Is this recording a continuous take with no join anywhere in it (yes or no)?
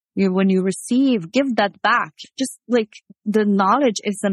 yes